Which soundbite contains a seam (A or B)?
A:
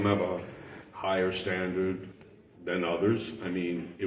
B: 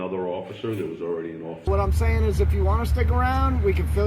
B